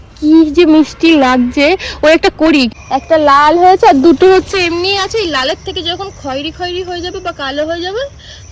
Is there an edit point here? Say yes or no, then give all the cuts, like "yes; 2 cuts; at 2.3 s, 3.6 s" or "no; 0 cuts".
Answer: yes; 1 cut; at 2.7 s